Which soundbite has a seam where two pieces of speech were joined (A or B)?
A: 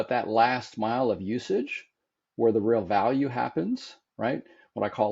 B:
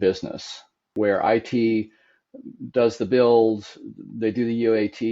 B